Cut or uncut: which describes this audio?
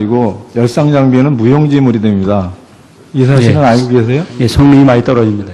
cut